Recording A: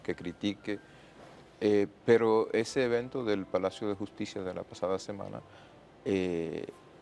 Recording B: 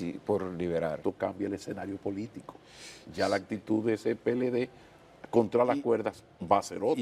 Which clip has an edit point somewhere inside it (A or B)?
B